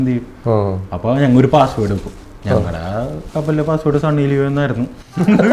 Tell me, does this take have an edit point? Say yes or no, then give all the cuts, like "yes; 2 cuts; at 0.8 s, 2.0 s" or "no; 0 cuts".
no; 0 cuts